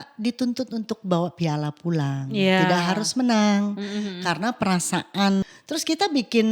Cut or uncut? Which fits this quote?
cut